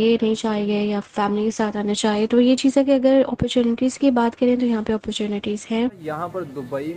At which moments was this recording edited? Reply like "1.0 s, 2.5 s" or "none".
6.0 s